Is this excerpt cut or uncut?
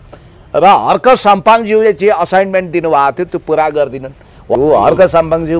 cut